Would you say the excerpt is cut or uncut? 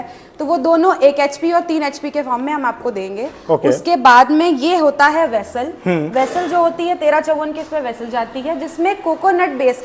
uncut